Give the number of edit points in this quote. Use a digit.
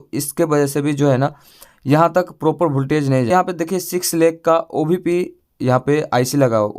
1